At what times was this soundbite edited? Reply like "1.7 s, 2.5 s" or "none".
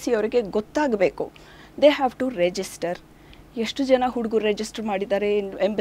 none